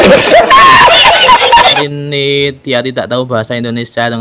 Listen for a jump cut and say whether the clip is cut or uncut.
cut